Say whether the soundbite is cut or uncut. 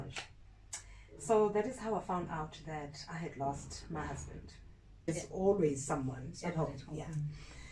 cut